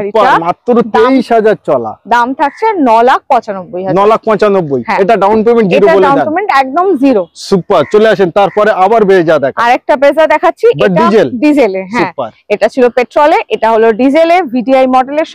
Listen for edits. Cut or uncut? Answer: uncut